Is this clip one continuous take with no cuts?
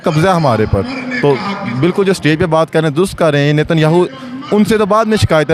yes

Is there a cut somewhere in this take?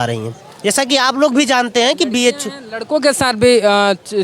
no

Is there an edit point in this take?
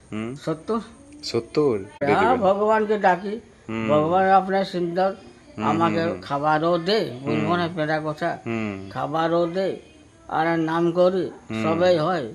yes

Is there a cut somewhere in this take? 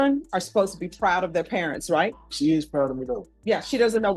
yes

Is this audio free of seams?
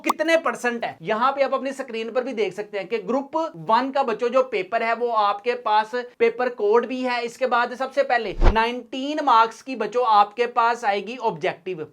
yes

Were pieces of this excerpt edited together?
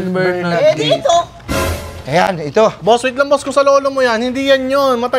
no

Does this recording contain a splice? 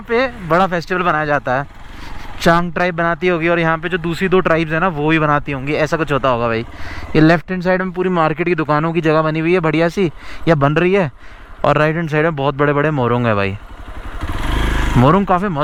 no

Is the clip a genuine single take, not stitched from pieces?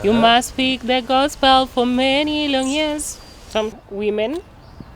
no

